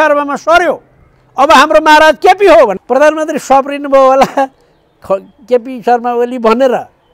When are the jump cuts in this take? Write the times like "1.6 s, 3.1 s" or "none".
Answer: 2.8 s

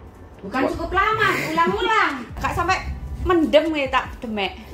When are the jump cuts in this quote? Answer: 2.3 s

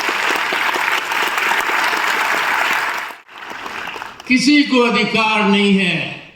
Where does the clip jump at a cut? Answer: 3.2 s

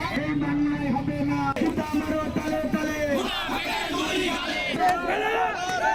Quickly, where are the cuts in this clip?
none

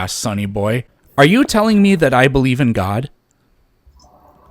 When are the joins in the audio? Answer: 1.0 s

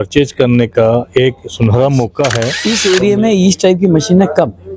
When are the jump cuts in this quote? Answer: 2.6 s

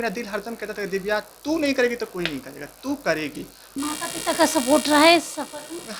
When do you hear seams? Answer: 3.6 s

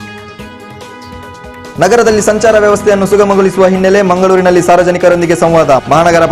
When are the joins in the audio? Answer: 1.3 s

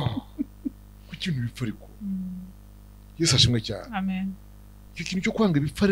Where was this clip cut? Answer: none

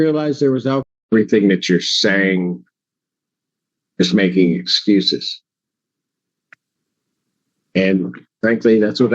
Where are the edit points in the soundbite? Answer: 1.0 s

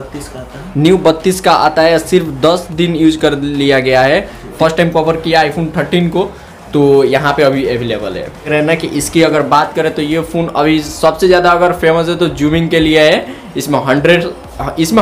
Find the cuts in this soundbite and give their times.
4.5 s, 8.5 s

